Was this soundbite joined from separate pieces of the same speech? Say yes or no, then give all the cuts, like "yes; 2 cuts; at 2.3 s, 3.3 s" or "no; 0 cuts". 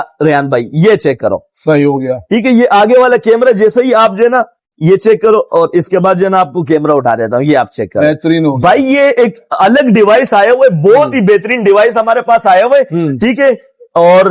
no; 0 cuts